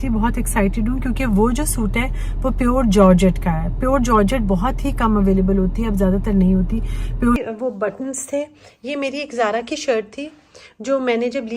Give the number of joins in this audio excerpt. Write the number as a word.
one